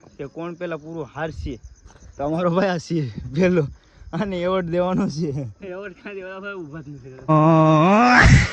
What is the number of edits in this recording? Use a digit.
0